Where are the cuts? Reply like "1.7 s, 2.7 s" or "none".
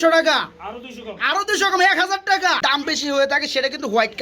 2.7 s